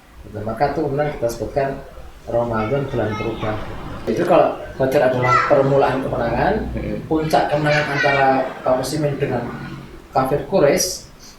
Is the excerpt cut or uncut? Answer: cut